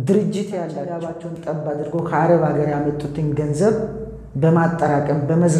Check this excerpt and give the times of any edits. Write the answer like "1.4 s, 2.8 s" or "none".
1.1 s